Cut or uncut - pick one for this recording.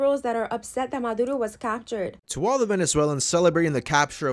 cut